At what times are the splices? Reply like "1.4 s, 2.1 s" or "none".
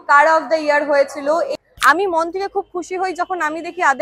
1.6 s